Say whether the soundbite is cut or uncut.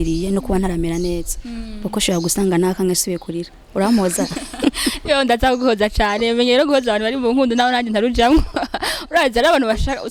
uncut